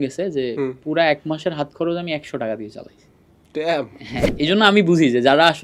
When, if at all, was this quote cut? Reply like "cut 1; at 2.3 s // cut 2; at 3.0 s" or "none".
cut 1; at 4.3 s